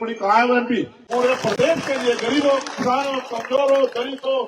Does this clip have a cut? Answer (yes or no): yes